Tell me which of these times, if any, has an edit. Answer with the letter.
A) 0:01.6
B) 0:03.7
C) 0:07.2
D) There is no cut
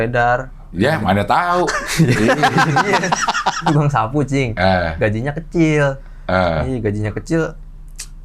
B